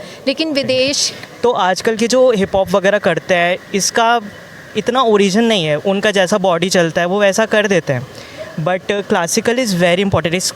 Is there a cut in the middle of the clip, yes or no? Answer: yes